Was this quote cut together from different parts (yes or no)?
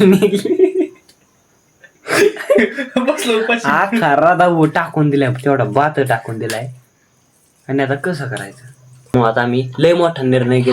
yes